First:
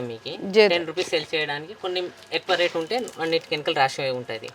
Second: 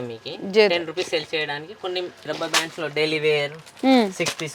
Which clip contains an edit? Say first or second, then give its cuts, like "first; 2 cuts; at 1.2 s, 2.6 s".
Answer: second; 1 cut; at 2.2 s